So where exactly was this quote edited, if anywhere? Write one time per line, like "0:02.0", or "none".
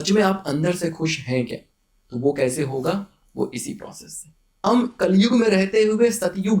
0:04.5